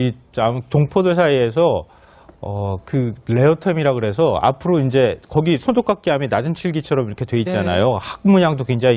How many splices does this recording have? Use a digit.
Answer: 1